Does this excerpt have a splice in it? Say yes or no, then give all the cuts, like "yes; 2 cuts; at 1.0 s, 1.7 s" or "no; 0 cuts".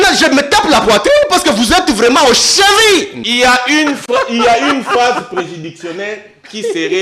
yes; 1 cut; at 3.2 s